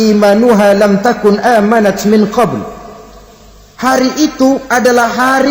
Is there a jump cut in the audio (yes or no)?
no